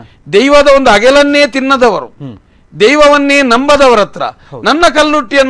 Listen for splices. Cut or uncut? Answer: uncut